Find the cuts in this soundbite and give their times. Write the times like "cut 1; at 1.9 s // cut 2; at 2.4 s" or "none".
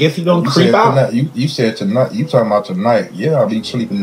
none